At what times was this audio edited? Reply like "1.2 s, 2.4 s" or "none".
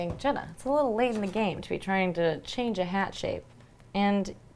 none